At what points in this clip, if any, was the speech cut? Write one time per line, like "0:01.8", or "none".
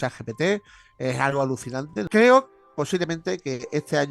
0:02.1